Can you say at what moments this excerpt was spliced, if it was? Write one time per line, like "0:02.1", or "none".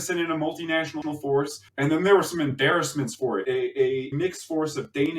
0:01.6
0:04.1